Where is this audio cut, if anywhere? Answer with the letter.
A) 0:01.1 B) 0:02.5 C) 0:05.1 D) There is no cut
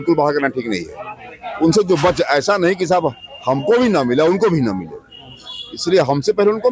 D